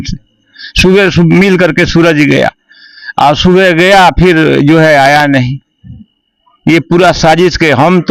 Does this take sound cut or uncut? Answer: uncut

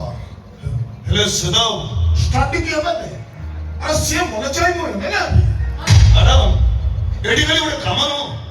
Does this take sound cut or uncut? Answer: cut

